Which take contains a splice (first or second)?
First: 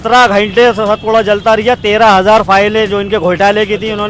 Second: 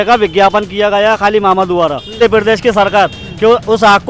second